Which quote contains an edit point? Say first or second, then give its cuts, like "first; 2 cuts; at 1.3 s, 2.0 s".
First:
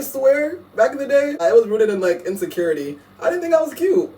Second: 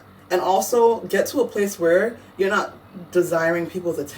first; 1 cut; at 1.4 s